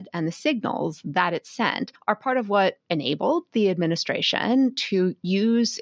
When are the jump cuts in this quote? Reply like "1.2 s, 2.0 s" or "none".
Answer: none